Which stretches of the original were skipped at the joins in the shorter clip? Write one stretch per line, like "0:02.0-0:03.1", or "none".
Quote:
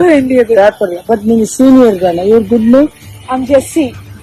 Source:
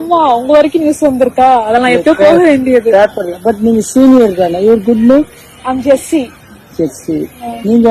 none